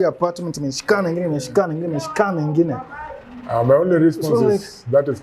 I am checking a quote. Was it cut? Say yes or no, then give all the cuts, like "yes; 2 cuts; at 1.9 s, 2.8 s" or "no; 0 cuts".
no; 0 cuts